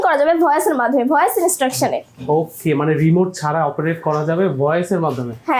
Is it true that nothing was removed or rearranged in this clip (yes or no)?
yes